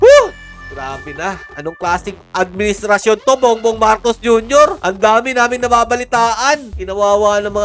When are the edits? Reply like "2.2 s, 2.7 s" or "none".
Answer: 6.6 s

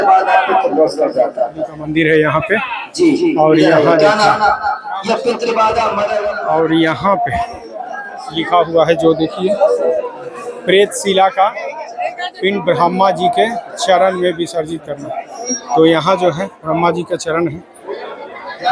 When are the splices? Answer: 6.3 s

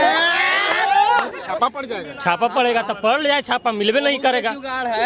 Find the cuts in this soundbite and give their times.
1.3 s

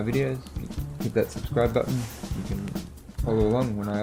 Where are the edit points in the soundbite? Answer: none

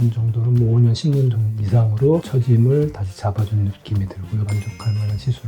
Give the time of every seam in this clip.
4.5 s

